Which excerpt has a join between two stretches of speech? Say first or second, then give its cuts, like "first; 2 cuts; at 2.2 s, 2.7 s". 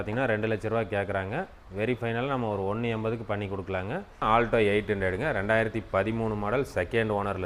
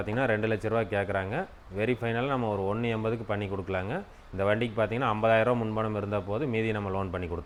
first; 1 cut; at 4.2 s